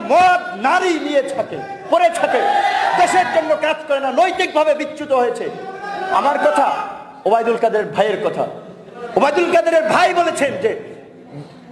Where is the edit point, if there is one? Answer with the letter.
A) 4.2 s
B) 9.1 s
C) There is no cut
C